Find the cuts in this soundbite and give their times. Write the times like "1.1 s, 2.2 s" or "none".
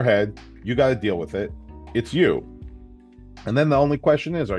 none